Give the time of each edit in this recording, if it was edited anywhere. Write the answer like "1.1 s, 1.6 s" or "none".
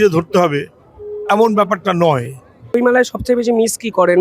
2.7 s